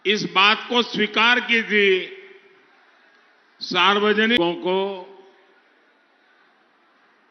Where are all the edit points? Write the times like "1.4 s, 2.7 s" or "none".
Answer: 4.4 s